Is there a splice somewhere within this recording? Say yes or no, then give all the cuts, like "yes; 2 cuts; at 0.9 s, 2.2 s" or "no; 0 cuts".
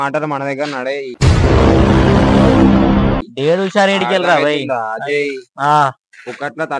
no; 0 cuts